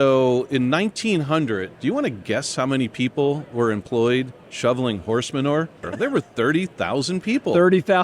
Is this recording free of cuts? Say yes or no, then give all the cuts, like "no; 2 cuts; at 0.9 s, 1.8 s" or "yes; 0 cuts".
no; 1 cut; at 5.9 s